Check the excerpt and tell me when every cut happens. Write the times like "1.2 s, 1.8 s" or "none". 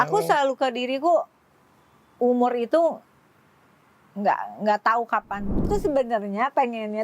5.7 s